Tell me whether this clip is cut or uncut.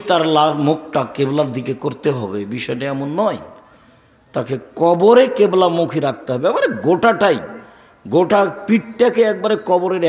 uncut